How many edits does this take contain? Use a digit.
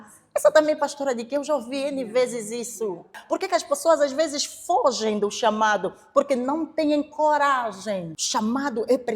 2